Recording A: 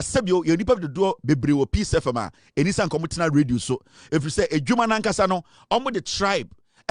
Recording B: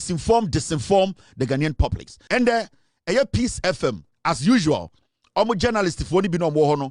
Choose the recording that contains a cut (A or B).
B